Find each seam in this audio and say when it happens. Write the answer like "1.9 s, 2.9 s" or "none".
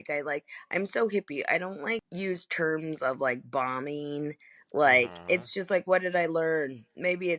2.1 s